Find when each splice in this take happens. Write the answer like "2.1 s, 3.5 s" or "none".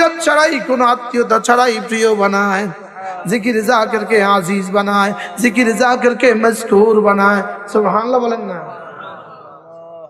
none